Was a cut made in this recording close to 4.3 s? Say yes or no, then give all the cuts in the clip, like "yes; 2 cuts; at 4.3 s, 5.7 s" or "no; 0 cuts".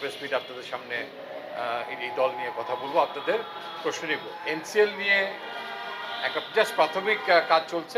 yes; 1 cut; at 4.3 s